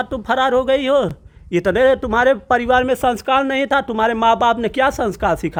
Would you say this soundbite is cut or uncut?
uncut